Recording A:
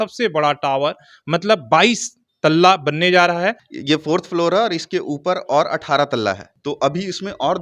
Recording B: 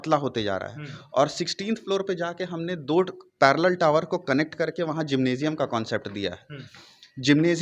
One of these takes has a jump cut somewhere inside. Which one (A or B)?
A